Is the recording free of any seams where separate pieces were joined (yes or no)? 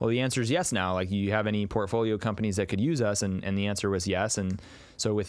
yes